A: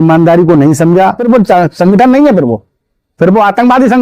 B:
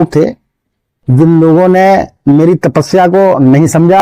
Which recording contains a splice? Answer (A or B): A